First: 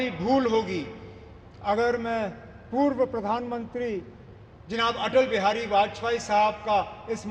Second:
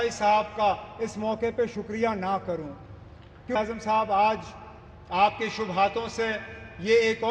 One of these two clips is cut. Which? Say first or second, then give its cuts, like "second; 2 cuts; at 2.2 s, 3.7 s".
second; 1 cut; at 3.6 s